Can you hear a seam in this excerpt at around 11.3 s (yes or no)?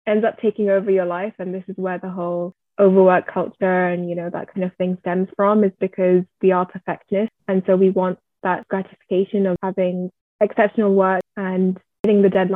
yes